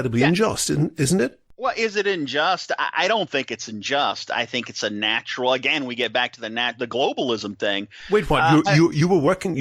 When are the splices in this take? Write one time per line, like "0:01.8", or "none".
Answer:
0:01.5